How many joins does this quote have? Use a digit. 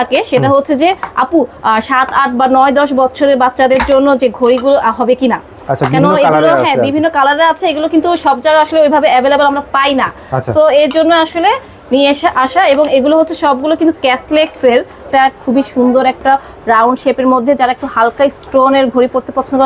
1